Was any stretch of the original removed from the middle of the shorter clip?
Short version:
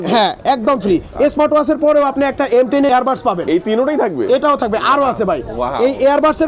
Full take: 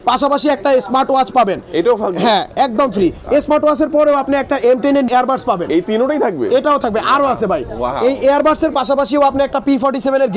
yes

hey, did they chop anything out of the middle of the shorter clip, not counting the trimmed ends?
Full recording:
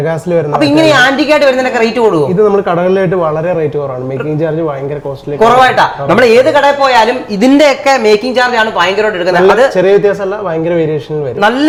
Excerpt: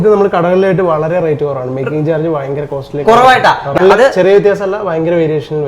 yes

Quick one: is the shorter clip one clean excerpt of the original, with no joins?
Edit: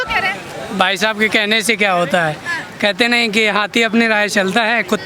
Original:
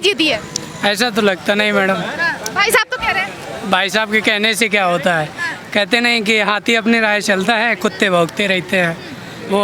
yes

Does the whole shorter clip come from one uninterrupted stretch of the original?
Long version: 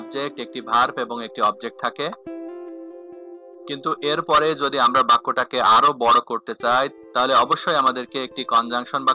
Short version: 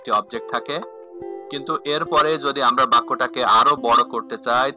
no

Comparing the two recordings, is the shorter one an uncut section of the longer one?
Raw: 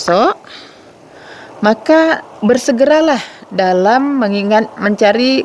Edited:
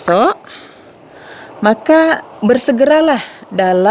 yes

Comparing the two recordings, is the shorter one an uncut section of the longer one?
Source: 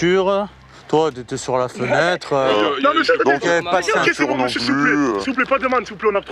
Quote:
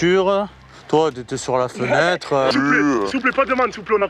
no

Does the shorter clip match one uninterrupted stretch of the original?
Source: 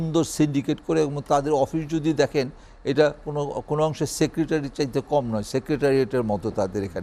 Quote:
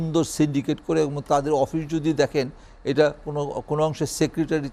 yes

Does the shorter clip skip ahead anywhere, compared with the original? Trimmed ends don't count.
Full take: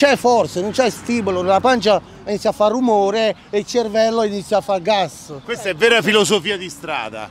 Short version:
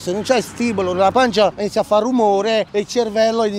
yes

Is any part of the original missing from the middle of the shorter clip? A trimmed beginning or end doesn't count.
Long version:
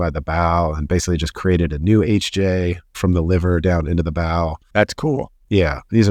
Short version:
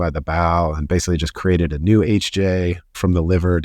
no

